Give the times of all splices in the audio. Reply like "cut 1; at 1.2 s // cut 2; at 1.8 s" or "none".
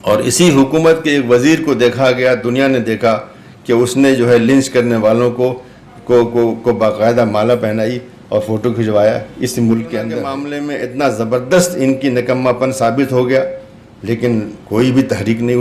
cut 1; at 10.3 s